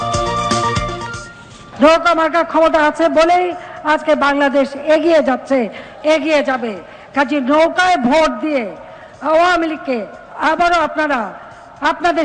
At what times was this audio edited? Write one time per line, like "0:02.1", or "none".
0:01.6